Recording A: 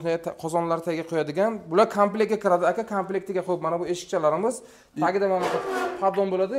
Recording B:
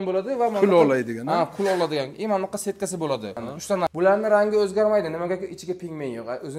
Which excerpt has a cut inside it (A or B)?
B